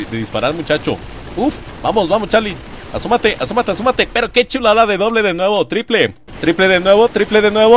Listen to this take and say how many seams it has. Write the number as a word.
one